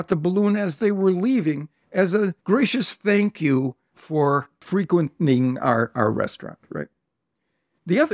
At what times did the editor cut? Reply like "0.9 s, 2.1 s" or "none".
2.4 s, 4.6 s